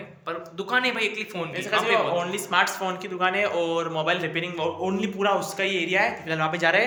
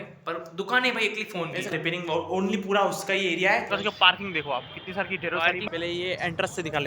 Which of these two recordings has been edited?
second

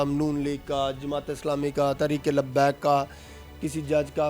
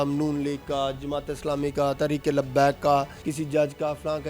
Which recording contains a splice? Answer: second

